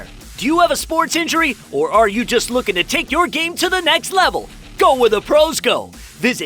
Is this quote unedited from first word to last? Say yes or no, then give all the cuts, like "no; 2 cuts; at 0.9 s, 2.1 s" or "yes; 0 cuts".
yes; 0 cuts